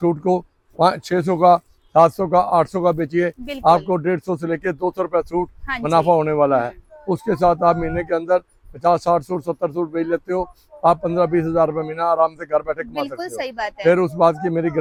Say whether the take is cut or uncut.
uncut